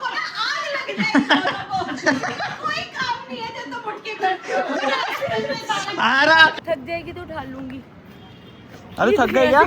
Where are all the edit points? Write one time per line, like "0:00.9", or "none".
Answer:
0:06.5